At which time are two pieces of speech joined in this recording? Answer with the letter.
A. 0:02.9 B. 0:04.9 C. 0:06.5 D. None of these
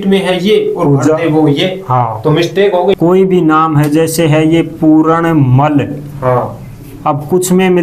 A